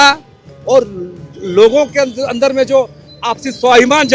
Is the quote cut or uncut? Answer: uncut